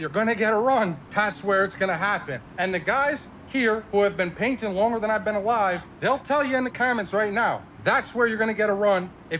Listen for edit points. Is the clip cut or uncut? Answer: cut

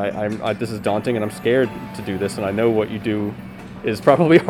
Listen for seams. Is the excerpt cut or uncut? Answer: uncut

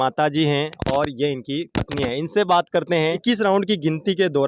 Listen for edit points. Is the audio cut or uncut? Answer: cut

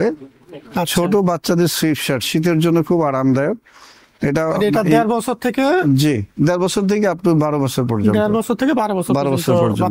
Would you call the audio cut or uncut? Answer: uncut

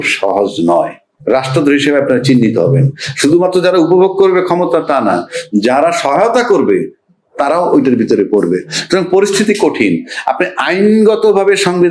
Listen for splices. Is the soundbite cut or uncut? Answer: cut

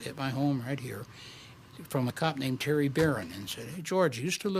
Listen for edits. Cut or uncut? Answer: cut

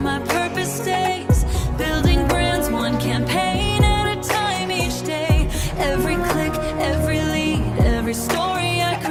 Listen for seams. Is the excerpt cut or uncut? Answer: uncut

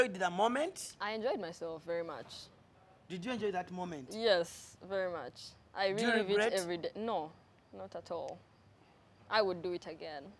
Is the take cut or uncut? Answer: uncut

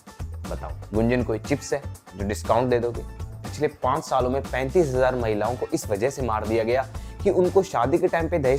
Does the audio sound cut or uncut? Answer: cut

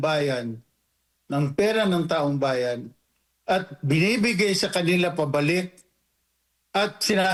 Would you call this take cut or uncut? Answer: uncut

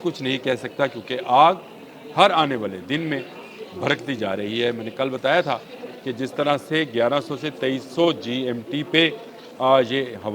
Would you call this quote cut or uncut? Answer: uncut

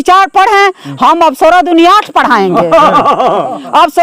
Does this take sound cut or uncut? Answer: uncut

